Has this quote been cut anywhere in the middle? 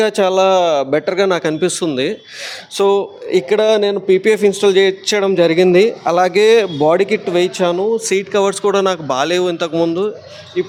no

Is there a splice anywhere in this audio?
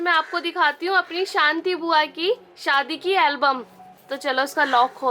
no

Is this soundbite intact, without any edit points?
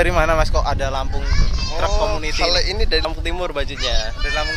yes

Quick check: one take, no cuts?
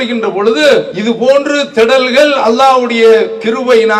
no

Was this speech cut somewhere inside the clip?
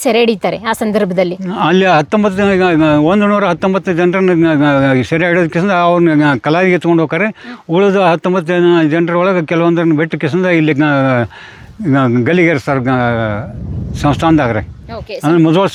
no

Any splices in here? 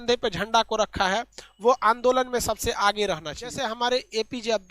yes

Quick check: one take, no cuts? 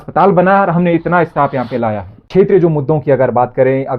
no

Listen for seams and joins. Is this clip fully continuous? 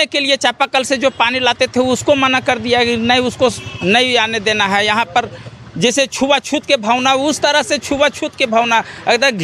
yes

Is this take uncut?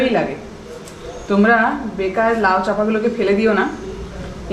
yes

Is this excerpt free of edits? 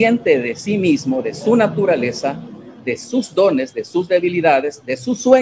yes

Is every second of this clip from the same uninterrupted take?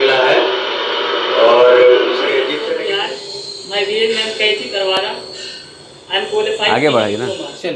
no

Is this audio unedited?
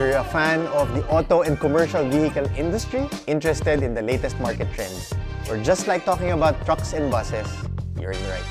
yes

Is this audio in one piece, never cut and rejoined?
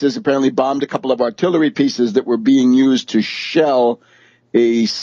yes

